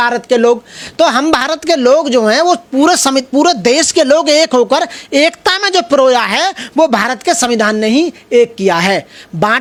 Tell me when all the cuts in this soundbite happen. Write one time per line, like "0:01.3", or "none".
none